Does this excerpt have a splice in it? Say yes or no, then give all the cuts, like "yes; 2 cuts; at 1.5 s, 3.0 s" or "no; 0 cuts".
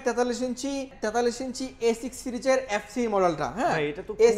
yes; 1 cut; at 0.9 s